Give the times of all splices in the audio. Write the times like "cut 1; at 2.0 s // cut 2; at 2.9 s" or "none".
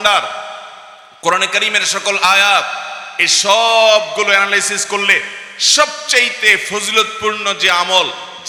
none